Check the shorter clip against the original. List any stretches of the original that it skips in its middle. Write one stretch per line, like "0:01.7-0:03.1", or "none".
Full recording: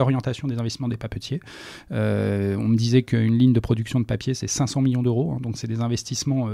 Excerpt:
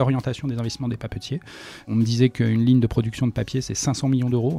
0:01.9-0:02.6